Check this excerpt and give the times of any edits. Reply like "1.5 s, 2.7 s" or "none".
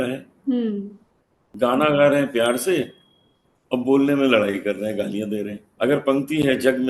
1.5 s, 5.6 s

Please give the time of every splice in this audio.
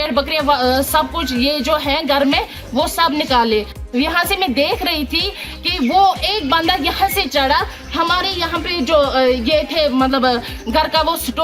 3.8 s

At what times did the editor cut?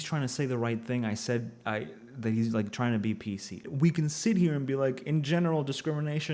3.6 s

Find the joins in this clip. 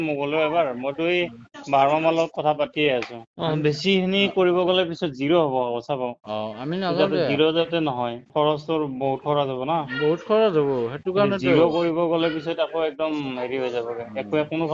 3.2 s, 8.2 s

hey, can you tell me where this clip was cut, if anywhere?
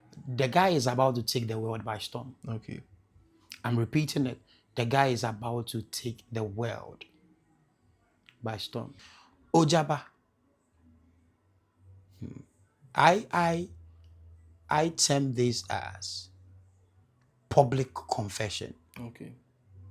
9.0 s

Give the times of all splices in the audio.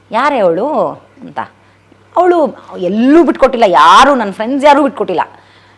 none

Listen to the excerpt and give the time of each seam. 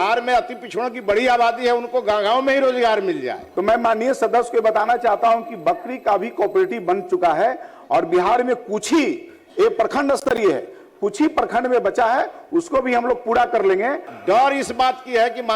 3.4 s, 14.1 s

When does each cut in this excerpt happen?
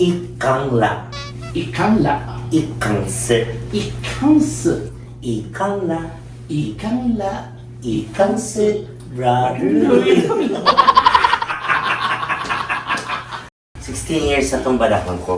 13.7 s

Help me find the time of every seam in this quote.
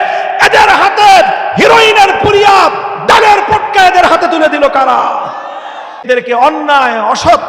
6.1 s

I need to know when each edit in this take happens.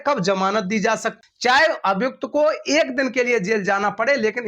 1.1 s

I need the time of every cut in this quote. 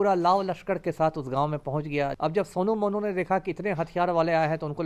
2.1 s

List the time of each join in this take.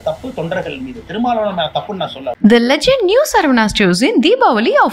2.2 s

